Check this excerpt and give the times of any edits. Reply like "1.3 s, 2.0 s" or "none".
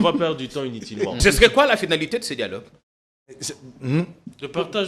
1.2 s